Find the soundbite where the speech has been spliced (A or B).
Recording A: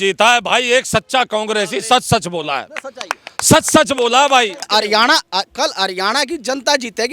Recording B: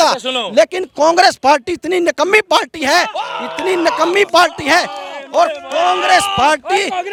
A